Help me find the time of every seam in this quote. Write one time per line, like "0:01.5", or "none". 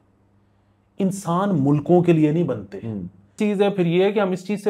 0:03.3